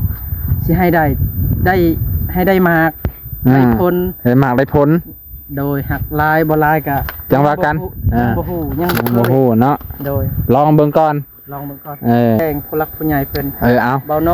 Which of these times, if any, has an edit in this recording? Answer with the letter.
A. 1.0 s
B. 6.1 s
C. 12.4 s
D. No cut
C